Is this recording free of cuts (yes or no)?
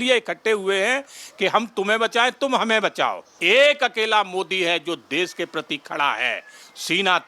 no